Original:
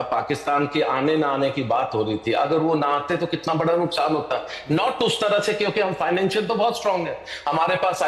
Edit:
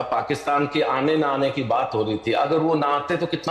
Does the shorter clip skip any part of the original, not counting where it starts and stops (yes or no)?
no